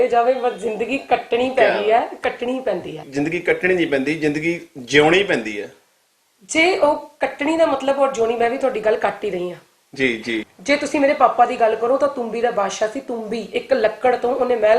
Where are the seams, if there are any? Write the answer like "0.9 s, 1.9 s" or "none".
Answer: 3.1 s, 10.5 s